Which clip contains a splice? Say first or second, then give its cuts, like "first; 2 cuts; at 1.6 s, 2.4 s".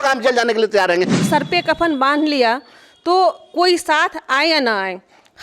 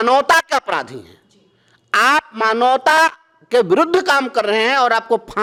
first; 1 cut; at 1.2 s